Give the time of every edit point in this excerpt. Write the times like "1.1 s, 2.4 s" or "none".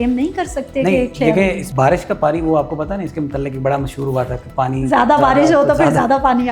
1.6 s